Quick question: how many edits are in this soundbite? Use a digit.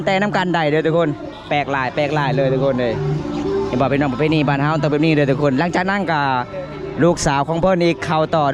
0